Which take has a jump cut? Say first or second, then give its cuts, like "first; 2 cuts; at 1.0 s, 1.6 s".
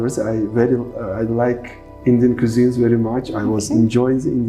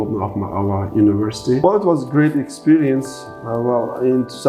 second; 1 cut; at 1.6 s